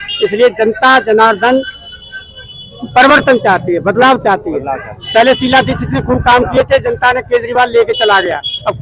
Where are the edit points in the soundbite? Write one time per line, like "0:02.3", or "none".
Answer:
none